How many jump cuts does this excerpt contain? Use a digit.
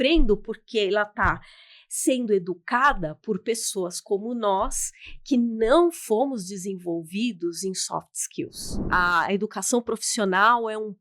1